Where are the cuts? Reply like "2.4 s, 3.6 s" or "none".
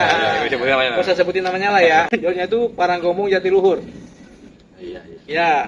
2.1 s

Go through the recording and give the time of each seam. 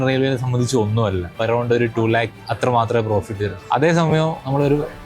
1.4 s, 2.4 s, 3.5 s

